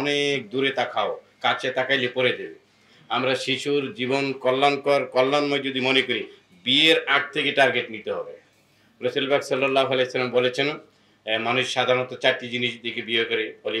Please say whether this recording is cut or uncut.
uncut